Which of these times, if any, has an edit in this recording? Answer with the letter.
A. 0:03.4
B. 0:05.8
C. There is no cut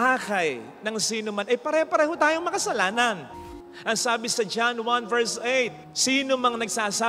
A